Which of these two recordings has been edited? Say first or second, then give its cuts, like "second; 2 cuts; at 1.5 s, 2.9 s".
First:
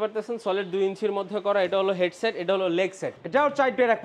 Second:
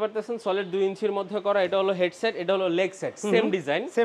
first; 1 cut; at 3.1 s